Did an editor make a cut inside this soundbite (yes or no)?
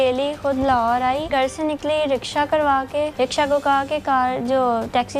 yes